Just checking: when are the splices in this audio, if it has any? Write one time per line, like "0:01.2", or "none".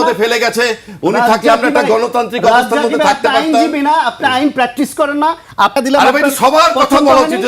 0:05.8